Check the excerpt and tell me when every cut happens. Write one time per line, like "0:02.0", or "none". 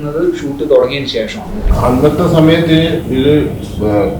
0:01.5